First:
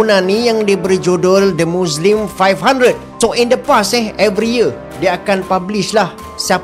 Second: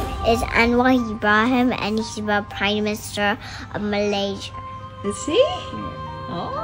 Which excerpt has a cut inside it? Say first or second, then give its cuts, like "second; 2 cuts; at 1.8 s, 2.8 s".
first; 1 cut; at 3.1 s